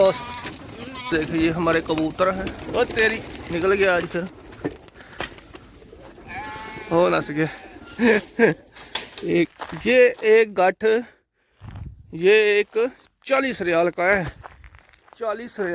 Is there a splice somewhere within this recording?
yes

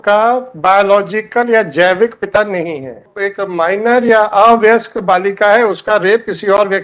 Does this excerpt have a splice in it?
yes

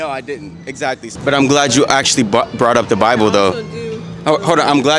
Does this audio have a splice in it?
yes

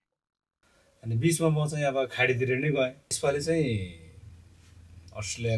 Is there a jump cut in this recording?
yes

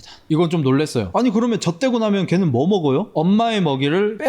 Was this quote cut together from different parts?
yes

